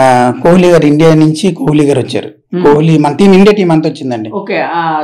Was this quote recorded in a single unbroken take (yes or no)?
yes